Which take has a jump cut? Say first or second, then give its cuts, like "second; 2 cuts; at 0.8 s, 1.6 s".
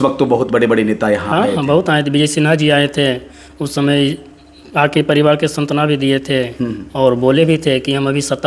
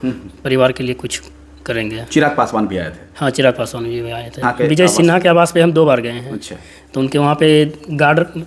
second; 1 cut; at 4.5 s